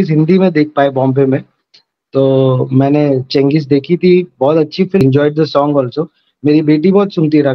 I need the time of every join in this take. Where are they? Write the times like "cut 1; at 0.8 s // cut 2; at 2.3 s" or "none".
cut 1; at 5.0 s